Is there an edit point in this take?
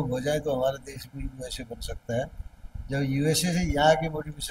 no; 0 cuts

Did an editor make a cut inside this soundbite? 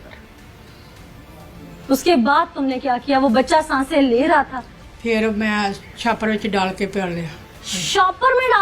yes; 1 cut; at 4.7 s

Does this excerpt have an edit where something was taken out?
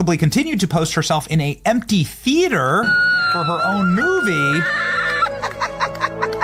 no; 0 cuts

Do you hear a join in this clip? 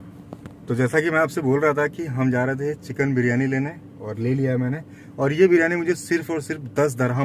no; 0 cuts

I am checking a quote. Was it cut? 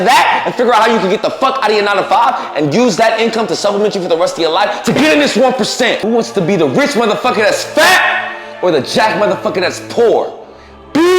yes; 1 cut; at 6.0 s

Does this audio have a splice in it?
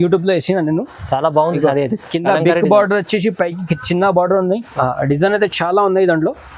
yes; 1 cut; at 4.7 s

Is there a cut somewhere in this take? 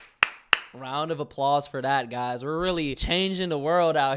yes; 1 cut; at 3.0 s

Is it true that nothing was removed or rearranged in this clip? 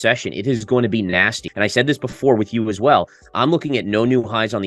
yes; 0 cuts

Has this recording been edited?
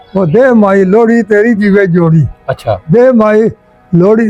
no; 0 cuts

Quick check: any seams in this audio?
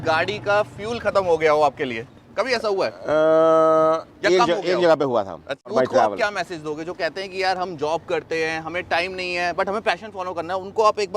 yes; 1 cut; at 5.7 s

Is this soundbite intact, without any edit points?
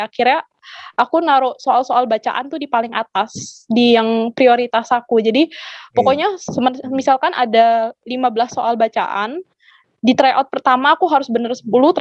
yes; 0 cuts

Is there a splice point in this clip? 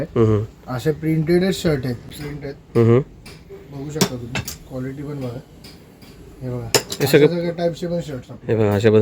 yes; 1 cut; at 2.1 s

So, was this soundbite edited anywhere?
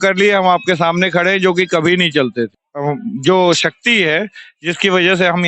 no; 0 cuts

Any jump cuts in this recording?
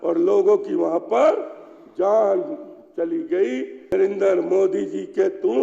yes; 1 cut; at 3.9 s

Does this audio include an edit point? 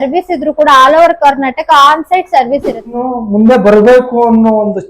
yes; 1 cut; at 3.0 s

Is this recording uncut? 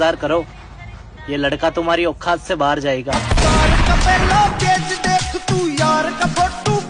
yes; 0 cuts

